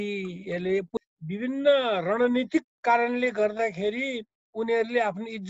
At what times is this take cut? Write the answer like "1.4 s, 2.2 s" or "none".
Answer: 1.0 s